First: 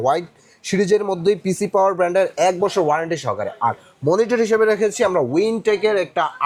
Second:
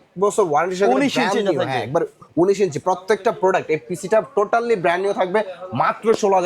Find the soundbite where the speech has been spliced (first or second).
second